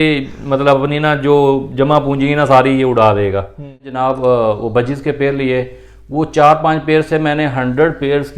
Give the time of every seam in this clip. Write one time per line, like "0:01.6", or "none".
0:03.8